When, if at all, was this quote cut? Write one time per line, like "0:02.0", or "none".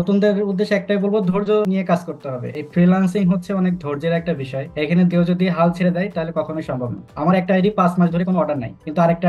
none